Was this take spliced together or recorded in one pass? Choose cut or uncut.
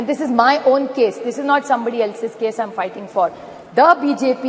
uncut